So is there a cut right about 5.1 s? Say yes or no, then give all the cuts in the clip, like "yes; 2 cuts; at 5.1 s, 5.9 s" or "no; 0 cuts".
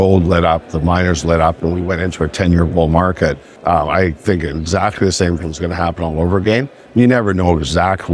no; 1 cut; at 3.5 s